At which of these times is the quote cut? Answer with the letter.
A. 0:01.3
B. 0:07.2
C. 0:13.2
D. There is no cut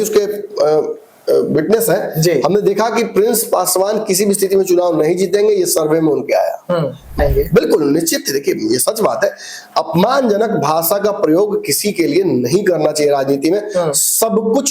B